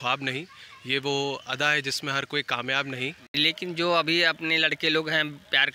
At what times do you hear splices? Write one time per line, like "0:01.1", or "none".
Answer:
0:03.2

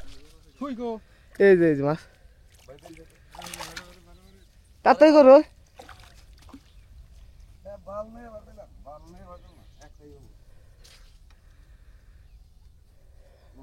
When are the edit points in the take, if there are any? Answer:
none

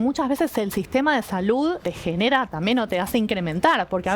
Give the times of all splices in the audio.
0:01.8

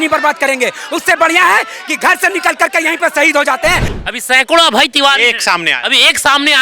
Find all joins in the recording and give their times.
0:03.9

